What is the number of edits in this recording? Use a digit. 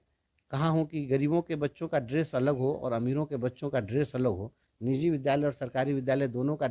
0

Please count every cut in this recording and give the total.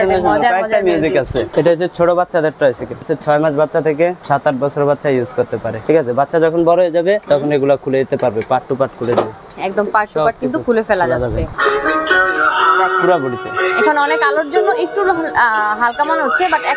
7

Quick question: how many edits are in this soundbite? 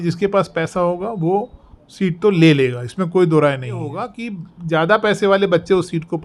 1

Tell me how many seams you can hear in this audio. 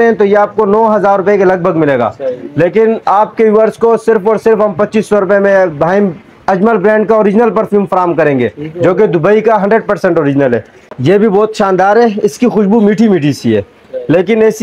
1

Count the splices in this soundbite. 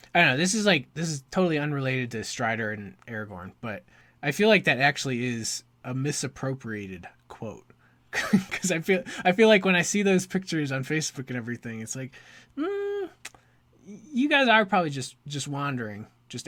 0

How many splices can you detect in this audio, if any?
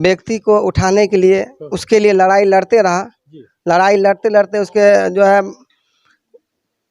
0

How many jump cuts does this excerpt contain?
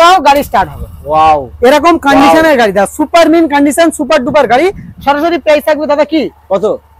0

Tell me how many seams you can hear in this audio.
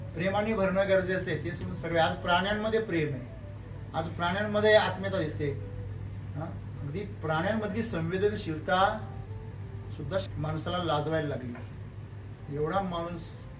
0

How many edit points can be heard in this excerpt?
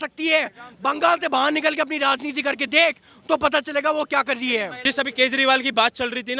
1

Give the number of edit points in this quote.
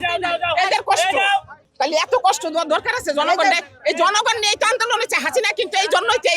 1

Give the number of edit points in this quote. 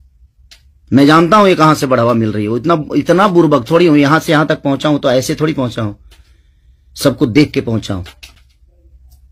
0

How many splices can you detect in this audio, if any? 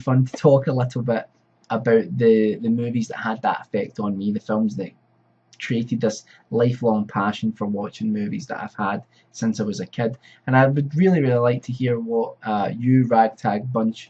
0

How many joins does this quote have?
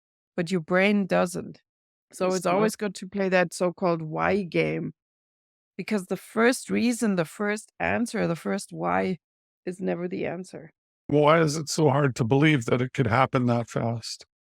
1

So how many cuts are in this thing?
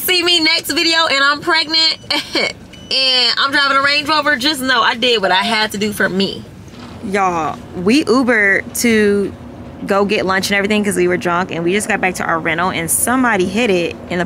1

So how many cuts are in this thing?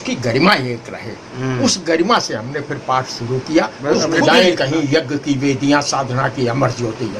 1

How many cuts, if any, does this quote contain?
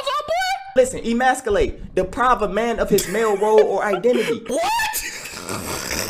2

